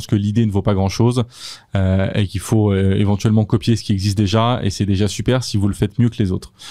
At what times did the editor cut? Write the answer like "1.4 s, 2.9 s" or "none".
none